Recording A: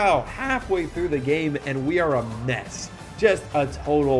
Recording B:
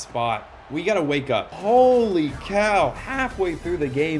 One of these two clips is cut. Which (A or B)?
B